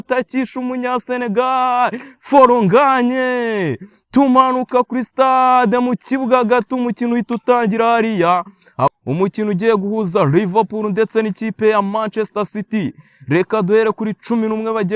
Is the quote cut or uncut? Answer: cut